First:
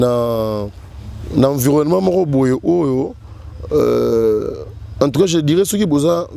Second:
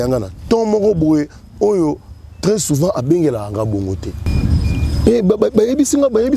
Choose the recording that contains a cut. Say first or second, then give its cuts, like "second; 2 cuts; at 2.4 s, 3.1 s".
second; 1 cut; at 4.2 s